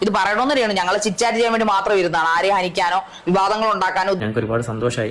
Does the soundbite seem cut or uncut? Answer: cut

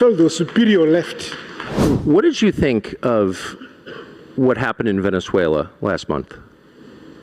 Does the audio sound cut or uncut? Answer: cut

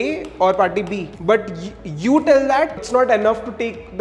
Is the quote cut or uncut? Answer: cut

